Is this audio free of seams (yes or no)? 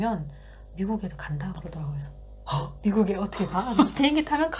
yes